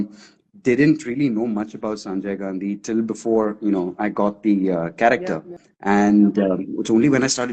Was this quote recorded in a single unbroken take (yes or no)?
yes